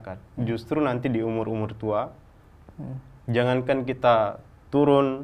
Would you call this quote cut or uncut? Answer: uncut